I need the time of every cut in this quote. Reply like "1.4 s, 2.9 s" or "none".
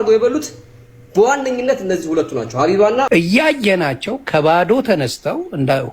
3.1 s